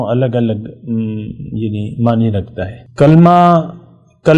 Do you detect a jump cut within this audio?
yes; 1 cut; at 2.8 s

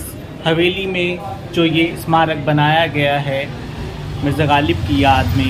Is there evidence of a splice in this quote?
no; 0 cuts

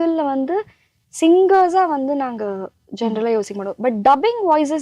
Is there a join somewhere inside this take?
no; 0 cuts

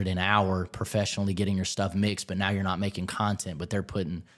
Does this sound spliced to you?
no; 0 cuts

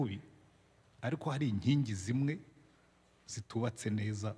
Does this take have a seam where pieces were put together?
no; 0 cuts

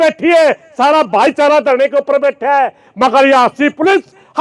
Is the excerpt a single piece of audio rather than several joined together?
yes; 0 cuts

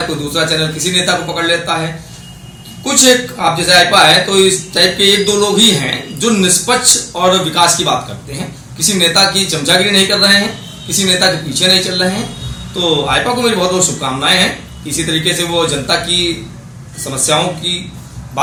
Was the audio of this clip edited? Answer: no; 0 cuts

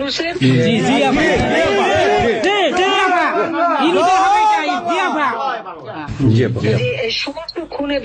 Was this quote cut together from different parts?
no; 0 cuts

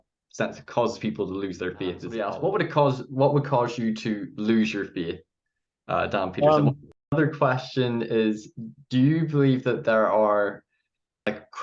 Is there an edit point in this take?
yes; 2 cuts; at 2.1 s, 6.8 s

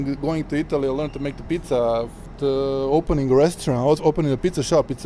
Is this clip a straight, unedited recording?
yes; 0 cuts

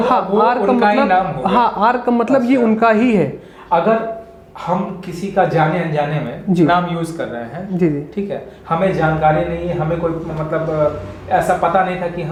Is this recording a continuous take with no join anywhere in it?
yes; 0 cuts

